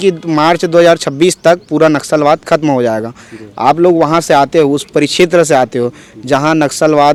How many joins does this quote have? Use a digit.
0